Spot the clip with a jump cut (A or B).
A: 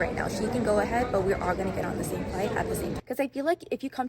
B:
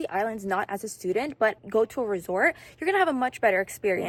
A